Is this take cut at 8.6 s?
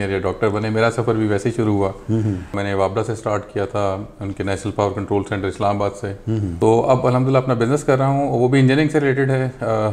no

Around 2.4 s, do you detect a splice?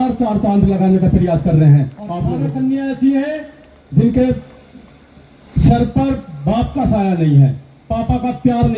yes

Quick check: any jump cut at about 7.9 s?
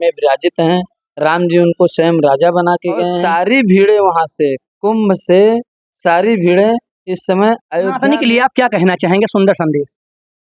yes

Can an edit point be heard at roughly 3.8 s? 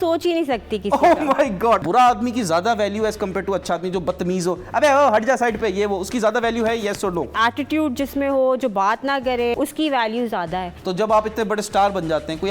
no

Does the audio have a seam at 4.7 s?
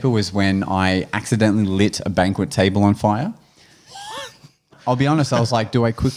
yes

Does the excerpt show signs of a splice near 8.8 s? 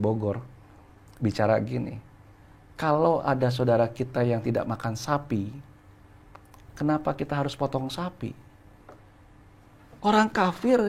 yes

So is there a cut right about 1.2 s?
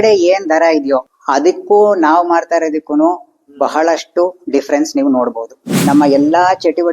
yes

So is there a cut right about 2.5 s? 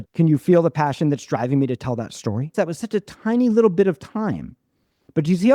yes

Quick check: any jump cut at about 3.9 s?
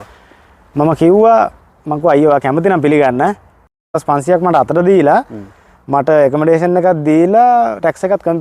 yes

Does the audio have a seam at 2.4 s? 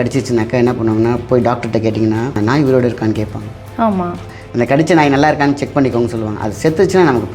yes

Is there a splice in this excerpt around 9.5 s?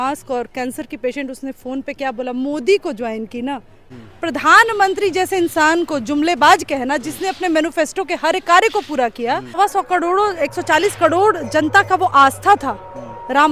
yes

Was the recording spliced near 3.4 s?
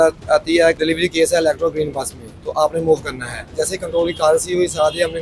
yes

